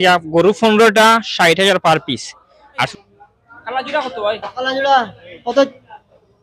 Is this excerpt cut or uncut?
cut